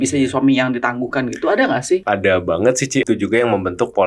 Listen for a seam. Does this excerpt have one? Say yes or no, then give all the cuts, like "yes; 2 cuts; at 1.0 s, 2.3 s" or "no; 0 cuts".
yes; 2 cuts; at 2.0 s, 3.0 s